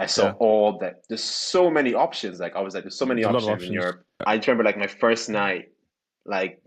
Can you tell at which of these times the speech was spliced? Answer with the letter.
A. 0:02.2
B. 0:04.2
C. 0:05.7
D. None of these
B